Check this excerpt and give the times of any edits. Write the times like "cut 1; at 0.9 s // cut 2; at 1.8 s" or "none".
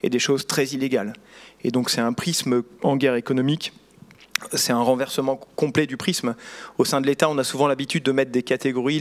none